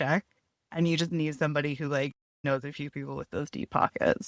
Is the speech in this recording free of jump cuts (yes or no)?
no